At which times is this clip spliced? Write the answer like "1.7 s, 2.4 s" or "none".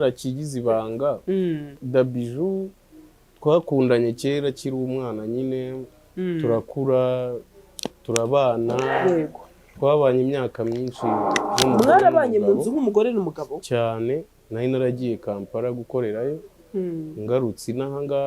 1.7 s, 14.4 s